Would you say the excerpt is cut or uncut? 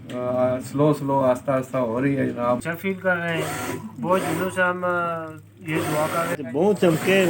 cut